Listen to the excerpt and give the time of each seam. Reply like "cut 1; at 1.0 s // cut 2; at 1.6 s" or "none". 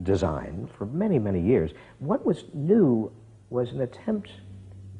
cut 1; at 1.4 s